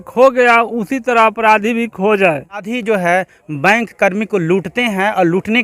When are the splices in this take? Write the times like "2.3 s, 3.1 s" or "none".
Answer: 2.7 s